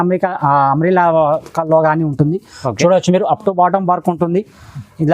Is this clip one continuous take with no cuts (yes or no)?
yes